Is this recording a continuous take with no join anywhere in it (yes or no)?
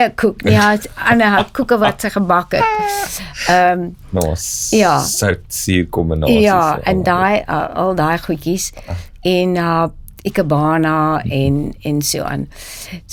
yes